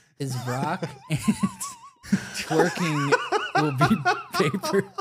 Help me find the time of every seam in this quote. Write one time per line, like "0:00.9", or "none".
0:02.0

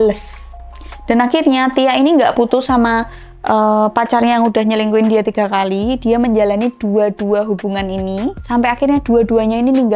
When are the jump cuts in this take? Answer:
none

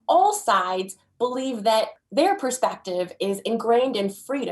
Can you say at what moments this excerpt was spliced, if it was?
0:02.0

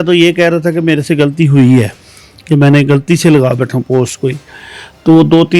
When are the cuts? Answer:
none

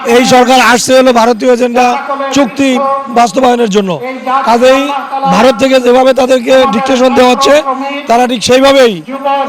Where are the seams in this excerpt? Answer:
none

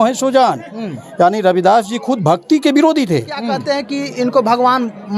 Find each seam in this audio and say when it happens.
0:03.6

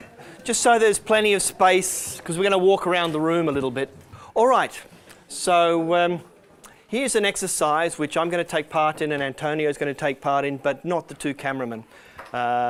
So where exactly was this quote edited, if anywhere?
none

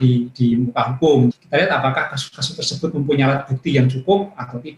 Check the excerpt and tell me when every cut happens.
0:01.4

